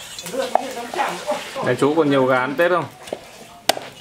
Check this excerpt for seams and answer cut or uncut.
cut